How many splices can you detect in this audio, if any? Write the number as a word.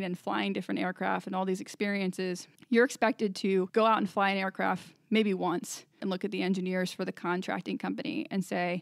three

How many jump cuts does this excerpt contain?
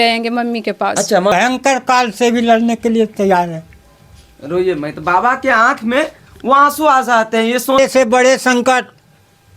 two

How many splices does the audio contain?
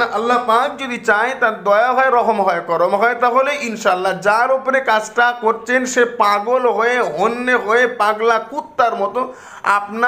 zero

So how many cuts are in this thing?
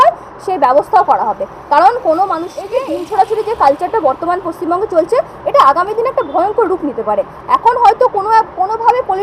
one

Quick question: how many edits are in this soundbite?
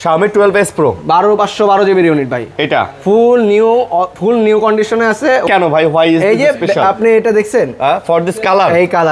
one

